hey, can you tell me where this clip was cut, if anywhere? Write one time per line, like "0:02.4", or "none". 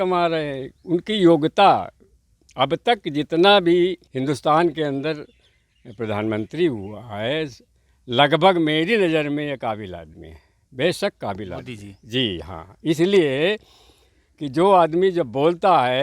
0:04.1